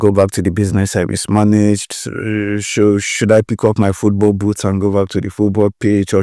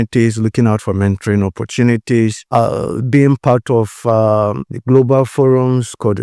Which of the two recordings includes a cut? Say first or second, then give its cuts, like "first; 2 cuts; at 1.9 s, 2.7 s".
second; 2 cuts; at 2.4 s, 4.7 s